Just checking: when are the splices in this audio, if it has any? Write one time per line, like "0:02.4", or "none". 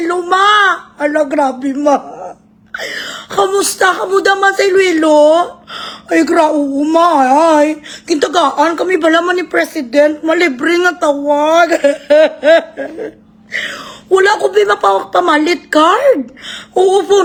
none